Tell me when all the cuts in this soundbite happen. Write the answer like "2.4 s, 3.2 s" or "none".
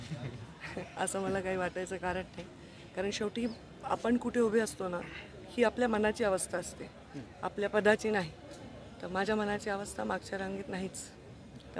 none